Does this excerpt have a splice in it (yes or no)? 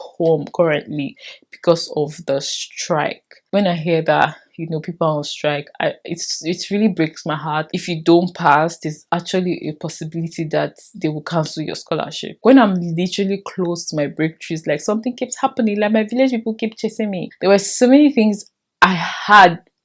yes